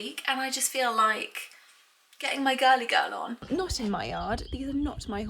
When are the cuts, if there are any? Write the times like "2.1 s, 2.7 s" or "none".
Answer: 3.4 s

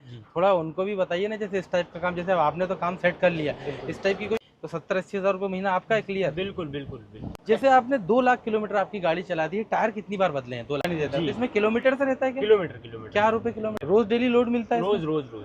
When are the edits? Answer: 4.4 s, 7.4 s, 10.9 s, 13.8 s

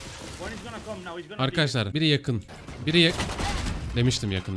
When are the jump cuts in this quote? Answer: 1.9 s

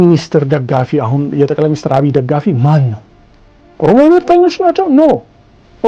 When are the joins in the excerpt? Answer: none

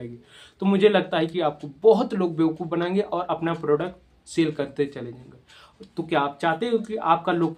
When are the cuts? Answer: none

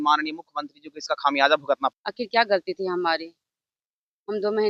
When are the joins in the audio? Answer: 2.0 s

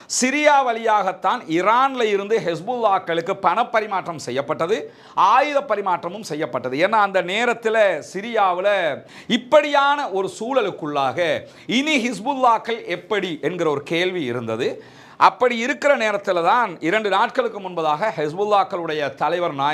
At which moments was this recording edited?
9.0 s

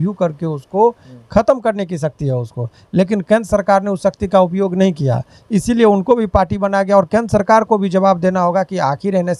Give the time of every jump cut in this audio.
none

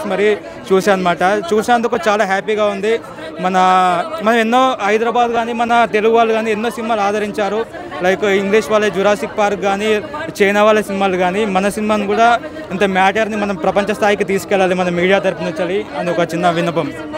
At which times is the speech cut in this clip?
none

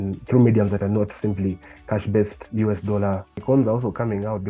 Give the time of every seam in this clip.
3.3 s

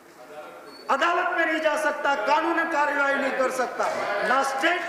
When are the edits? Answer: none

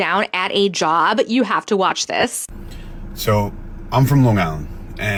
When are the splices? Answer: none

